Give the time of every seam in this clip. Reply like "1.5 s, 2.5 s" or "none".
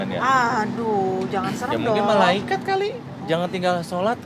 none